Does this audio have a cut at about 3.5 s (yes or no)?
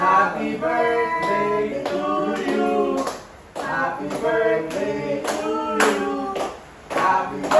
no